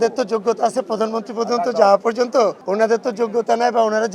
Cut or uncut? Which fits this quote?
cut